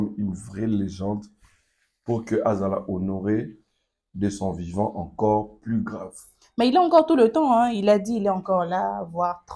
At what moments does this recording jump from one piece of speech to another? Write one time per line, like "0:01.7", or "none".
none